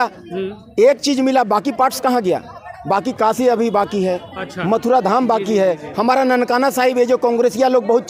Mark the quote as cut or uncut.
uncut